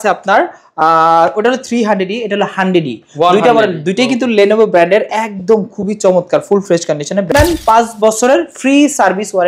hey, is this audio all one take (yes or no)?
no